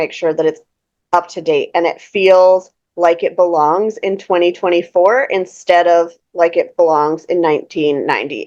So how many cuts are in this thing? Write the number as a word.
zero